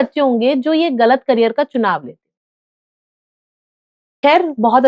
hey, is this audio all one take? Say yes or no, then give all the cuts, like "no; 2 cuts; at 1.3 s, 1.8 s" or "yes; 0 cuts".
yes; 0 cuts